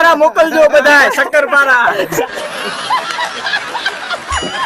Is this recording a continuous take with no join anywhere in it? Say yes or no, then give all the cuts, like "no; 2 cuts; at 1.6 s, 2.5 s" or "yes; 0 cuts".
yes; 0 cuts